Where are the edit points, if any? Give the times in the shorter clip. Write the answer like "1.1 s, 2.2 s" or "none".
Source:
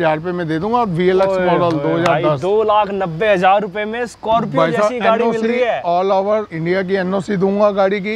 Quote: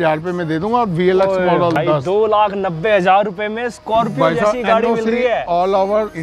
1.8 s